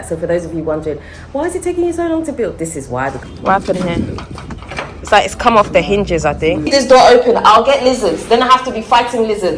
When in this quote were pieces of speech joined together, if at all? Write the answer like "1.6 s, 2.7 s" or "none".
3.2 s, 6.6 s